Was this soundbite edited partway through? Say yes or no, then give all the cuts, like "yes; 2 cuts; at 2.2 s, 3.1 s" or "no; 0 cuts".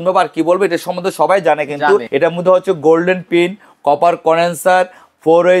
yes; 1 cut; at 2.1 s